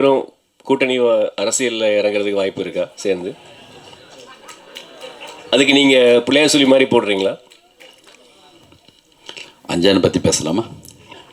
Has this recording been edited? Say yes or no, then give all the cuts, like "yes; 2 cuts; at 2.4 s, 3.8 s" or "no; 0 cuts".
no; 0 cuts